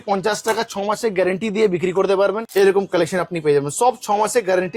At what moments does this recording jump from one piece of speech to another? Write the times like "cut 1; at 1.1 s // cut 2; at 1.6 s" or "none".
cut 1; at 2.4 s